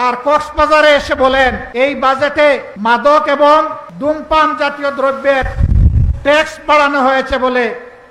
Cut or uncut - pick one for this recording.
cut